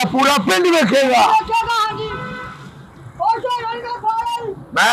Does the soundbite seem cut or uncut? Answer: uncut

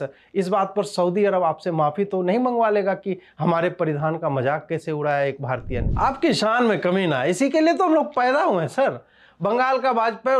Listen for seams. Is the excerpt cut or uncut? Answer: cut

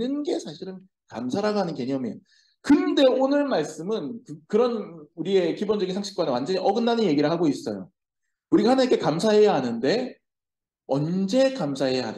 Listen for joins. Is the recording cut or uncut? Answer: uncut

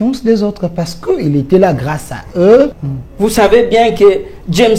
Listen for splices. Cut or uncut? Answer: cut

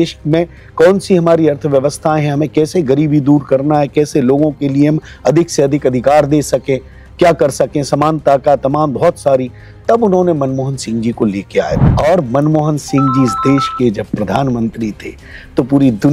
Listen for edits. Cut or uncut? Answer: cut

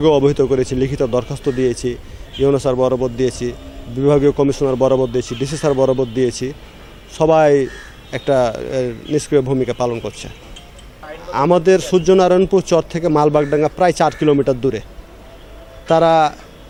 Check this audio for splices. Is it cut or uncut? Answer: uncut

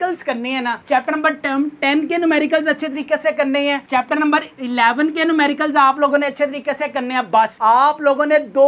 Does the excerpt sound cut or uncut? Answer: uncut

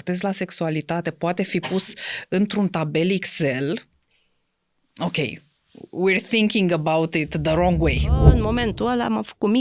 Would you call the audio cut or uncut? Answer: cut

